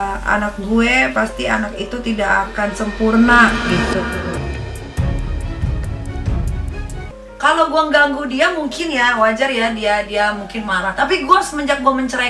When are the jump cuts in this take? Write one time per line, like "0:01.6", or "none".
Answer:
0:07.0

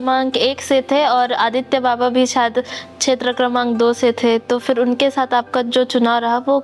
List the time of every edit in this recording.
none

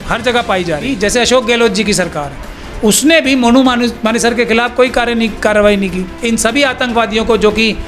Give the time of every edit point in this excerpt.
0:00.9
0:06.1

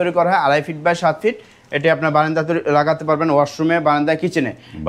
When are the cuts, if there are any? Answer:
none

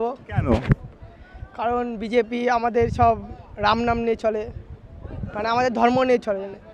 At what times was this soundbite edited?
none

